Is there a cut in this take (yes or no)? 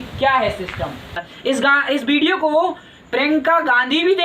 yes